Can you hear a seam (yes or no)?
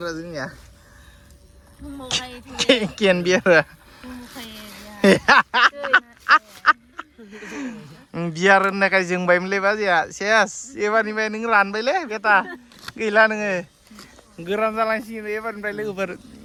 no